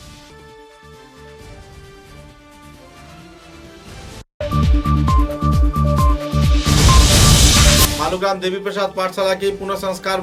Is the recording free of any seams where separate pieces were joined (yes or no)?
yes